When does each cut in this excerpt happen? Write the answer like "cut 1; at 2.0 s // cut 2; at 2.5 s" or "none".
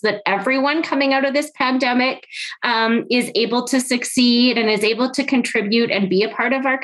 none